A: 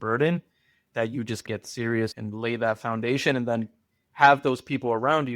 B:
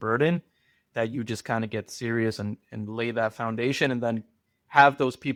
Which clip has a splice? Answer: A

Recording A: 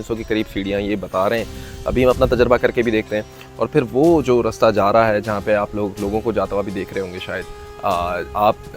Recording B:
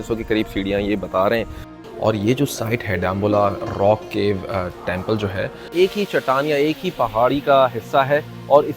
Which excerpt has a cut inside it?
B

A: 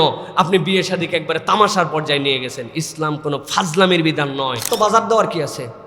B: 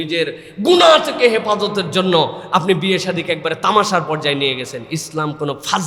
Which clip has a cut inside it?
A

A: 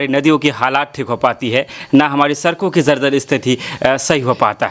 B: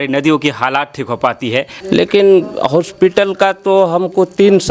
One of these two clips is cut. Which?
B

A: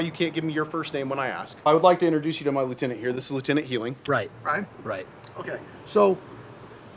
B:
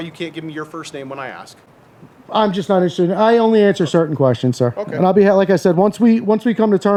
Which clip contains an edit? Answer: A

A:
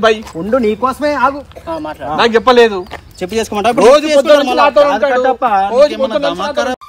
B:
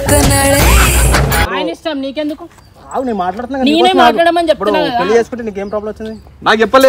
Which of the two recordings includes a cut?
B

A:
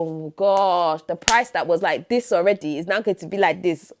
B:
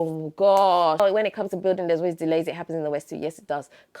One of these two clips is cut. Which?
B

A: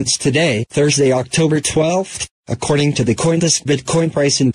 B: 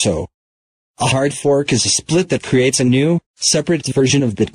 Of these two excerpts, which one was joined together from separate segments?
B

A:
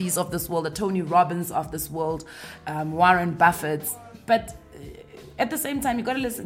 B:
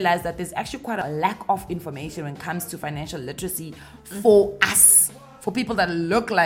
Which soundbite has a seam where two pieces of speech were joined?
B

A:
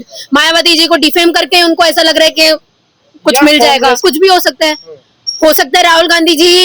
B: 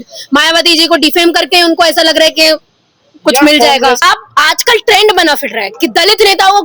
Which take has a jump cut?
B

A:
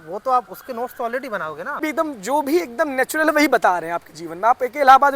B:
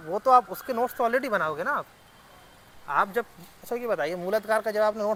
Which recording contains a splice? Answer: A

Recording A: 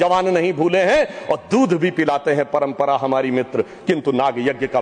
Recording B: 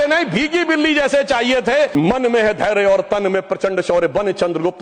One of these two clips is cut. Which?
B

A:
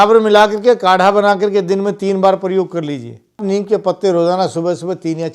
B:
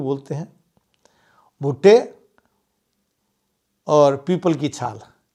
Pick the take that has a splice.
A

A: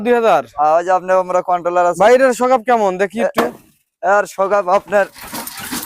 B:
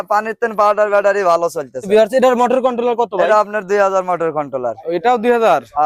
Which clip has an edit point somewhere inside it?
B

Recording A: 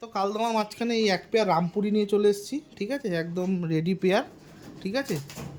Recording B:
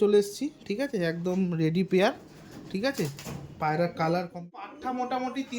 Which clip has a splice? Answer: B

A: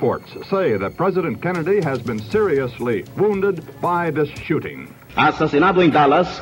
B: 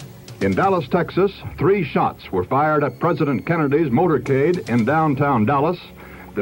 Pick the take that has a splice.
A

